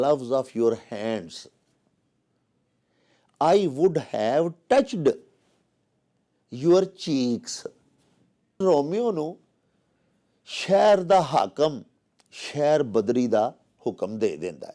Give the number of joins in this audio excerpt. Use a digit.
1